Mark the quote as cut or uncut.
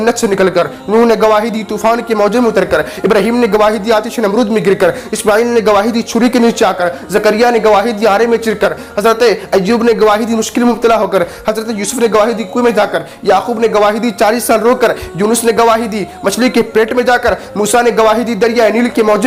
uncut